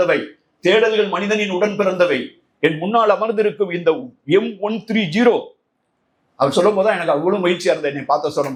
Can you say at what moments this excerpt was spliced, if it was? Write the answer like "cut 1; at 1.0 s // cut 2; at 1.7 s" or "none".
none